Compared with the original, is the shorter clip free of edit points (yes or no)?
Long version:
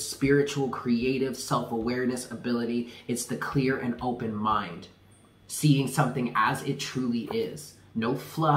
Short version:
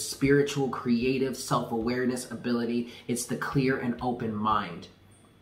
yes